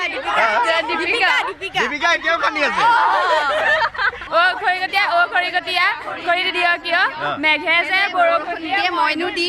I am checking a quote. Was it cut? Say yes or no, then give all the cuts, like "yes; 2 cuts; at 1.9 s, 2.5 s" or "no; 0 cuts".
yes; 1 cut; at 4.1 s